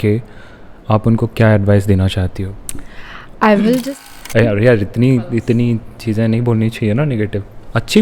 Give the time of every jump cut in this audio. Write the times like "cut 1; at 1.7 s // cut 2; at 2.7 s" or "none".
cut 1; at 3.8 s